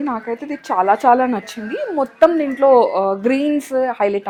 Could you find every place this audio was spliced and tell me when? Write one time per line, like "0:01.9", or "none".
none